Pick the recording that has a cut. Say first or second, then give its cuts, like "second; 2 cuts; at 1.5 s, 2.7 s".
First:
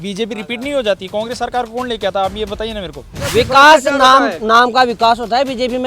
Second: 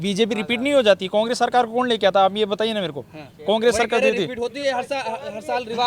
first; 1 cut; at 3.2 s